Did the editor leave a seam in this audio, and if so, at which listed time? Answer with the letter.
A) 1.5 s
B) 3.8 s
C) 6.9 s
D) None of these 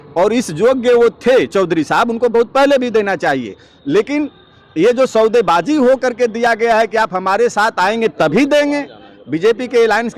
D